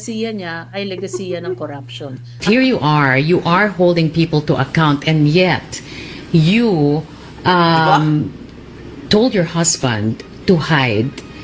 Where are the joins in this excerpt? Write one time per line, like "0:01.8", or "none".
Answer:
0:02.4